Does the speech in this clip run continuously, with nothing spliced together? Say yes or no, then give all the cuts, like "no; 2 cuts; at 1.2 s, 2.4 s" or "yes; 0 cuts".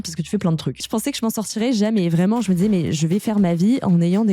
no; 2 cuts; at 0.9 s, 3.0 s